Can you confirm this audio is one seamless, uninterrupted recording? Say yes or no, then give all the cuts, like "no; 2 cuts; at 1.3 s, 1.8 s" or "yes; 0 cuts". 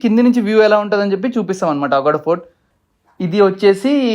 no; 1 cut; at 2.7 s